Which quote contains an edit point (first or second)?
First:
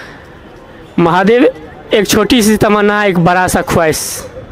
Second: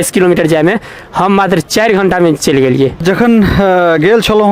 second